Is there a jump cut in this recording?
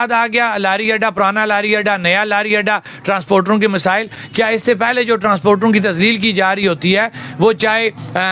no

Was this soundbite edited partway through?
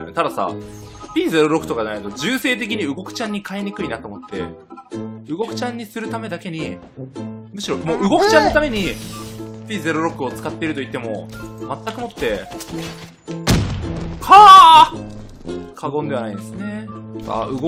no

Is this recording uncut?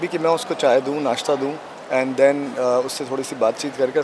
yes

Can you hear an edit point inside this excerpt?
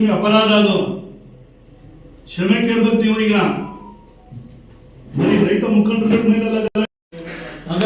no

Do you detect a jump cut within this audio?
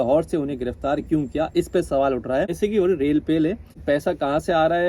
yes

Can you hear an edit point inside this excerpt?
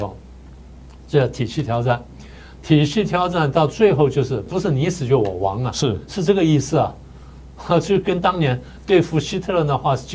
yes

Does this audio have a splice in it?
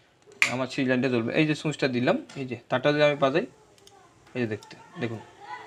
no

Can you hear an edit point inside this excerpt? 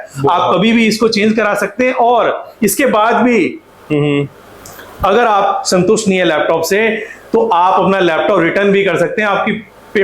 no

